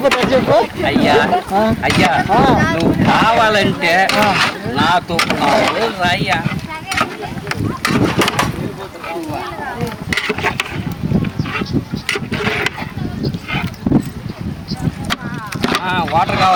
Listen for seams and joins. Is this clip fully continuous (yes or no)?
yes